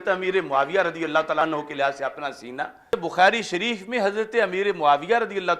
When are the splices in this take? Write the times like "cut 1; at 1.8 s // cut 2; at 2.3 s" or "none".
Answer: cut 1; at 1.4 s // cut 2; at 2.9 s